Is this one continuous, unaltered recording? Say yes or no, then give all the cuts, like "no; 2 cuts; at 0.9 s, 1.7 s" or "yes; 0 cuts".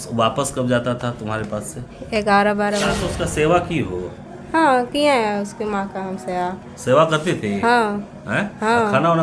no; 1 cut; at 3.1 s